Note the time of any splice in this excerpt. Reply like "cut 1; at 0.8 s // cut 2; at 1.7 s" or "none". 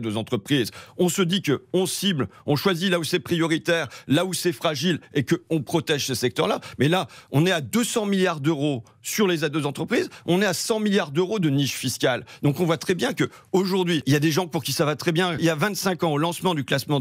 cut 1; at 14.0 s // cut 2; at 15.4 s